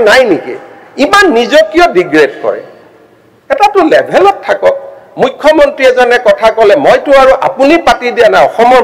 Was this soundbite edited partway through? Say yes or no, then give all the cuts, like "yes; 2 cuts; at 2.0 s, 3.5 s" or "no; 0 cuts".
no; 0 cuts